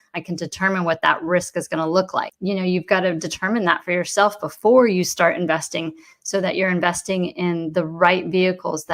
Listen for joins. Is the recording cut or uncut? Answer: cut